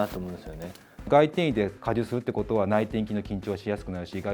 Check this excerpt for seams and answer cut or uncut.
cut